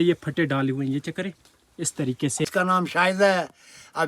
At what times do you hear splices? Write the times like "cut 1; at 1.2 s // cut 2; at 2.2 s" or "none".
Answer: cut 1; at 2.4 s